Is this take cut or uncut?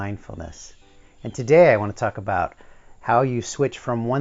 uncut